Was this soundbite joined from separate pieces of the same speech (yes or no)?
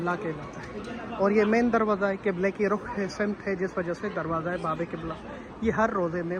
no